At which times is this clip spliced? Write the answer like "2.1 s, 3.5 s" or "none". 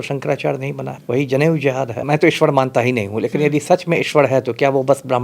0.9 s, 2.0 s